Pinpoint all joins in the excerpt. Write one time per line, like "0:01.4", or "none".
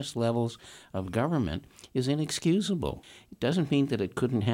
0:03.1